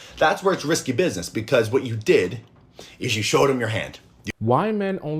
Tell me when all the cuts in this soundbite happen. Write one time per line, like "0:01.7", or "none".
0:04.2

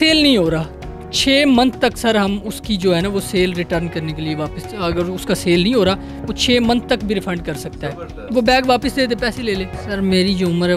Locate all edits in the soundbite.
0:09.8

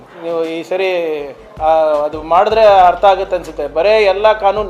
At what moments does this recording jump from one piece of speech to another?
none

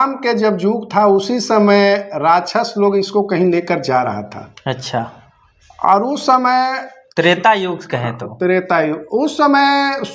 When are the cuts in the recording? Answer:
none

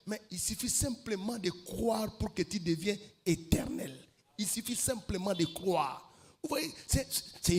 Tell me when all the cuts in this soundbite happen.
none

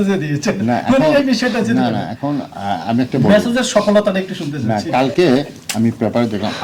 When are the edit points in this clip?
none

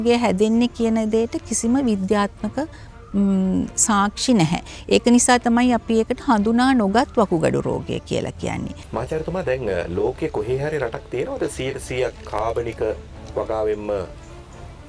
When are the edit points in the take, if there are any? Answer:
0:08.8

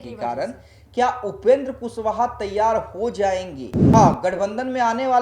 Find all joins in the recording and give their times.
0:03.9

